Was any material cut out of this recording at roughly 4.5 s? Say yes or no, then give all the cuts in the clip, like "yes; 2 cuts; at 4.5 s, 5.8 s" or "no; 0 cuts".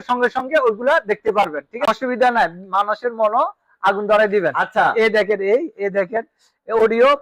no; 1 cut; at 1.9 s